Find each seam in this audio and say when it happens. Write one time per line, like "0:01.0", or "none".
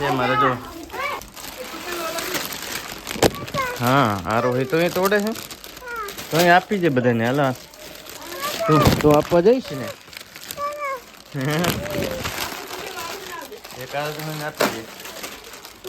0:01.2